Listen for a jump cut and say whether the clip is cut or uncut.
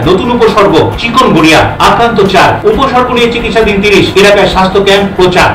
uncut